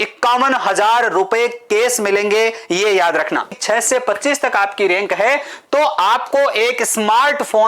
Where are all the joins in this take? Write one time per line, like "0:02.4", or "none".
0:03.6